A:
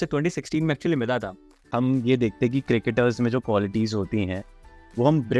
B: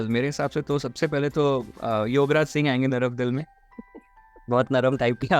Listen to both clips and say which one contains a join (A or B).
A